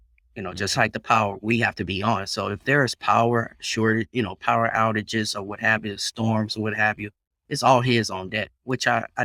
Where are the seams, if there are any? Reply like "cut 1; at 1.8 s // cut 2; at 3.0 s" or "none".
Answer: none